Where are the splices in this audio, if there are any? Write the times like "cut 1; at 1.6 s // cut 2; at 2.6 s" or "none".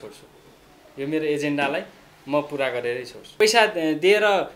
cut 1; at 3.4 s

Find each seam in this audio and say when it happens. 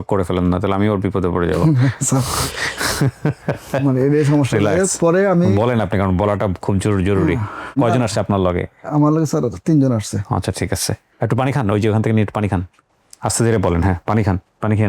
cut 1; at 7.7 s

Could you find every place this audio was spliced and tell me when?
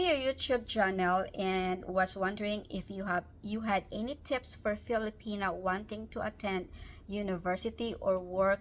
none

